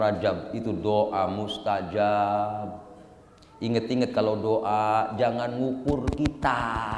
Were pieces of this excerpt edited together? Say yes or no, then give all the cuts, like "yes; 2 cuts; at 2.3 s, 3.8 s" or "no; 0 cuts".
no; 0 cuts